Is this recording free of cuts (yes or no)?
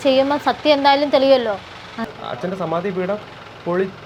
yes